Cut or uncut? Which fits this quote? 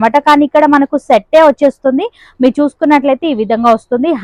uncut